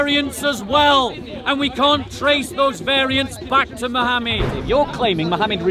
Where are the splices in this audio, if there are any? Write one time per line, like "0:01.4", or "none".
0:04.5